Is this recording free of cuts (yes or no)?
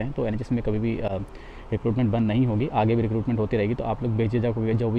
yes